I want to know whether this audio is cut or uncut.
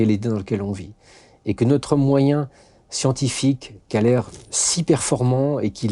uncut